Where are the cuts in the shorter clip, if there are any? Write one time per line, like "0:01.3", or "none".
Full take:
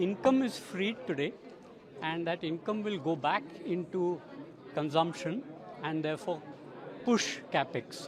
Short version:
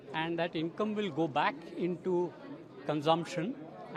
none